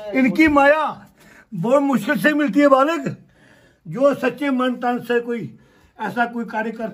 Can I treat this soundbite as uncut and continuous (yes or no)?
yes